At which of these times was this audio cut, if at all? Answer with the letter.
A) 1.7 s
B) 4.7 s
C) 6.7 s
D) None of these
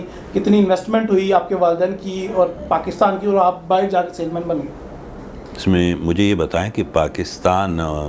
D